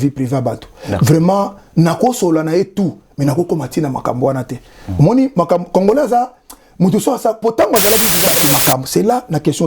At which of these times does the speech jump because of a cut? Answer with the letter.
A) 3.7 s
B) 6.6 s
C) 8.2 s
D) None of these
C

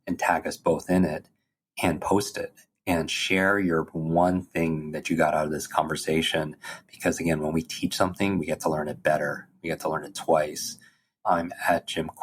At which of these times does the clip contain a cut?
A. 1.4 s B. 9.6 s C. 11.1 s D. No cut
C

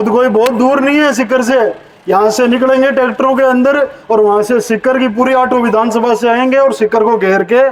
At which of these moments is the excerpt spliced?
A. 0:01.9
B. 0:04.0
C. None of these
C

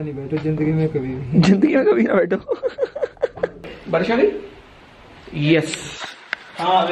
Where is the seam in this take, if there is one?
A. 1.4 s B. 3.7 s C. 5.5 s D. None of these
B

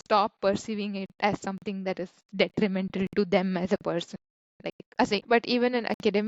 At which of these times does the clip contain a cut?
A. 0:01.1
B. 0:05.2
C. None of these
B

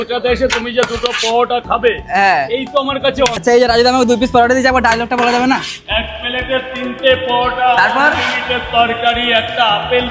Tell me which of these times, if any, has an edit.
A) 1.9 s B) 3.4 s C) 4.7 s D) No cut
B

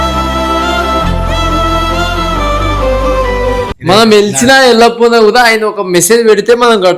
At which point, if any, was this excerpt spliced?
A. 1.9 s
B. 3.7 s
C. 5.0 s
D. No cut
B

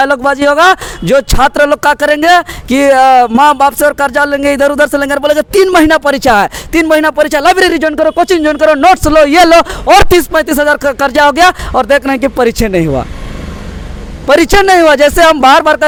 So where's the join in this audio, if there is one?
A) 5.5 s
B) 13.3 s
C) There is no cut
C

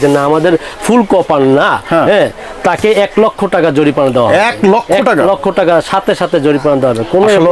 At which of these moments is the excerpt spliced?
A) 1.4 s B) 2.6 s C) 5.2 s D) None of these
D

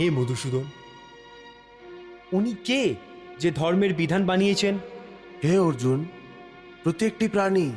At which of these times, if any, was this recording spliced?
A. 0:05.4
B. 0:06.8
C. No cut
C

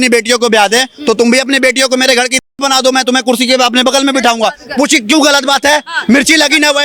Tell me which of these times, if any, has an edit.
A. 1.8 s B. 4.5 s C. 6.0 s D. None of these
D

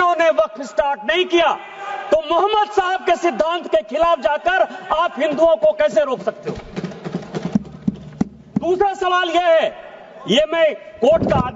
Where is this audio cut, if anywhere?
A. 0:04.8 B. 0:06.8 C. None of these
C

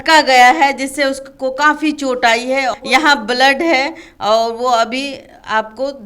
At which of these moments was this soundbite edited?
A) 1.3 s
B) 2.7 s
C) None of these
B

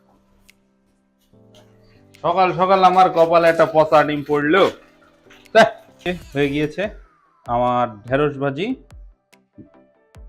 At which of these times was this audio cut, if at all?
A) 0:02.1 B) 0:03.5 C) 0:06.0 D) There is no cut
C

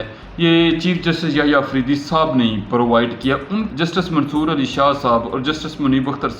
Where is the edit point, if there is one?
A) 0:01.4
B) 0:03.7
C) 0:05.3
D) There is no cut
B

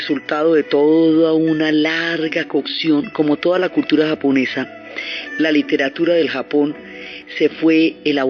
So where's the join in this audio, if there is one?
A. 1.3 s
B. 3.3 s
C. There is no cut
B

